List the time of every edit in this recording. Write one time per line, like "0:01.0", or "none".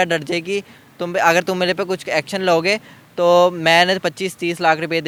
none